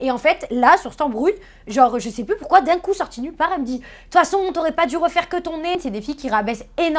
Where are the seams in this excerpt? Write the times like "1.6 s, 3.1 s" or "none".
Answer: 5.8 s